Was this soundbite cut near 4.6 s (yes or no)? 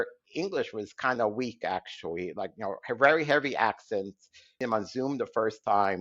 yes